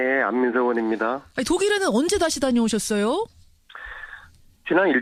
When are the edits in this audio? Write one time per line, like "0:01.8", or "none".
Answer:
none